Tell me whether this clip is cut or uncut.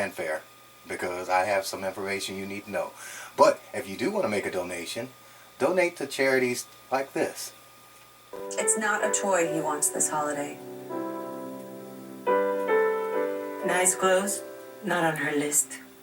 cut